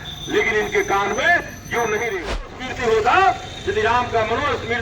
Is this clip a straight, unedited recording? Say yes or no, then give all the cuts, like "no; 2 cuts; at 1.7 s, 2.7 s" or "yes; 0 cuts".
no; 1 cut; at 2.3 s